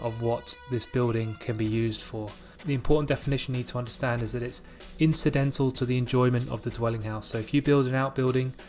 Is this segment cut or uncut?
cut